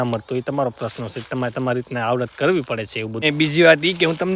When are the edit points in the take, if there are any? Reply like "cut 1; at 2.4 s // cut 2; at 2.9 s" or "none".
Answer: cut 1; at 3.1 s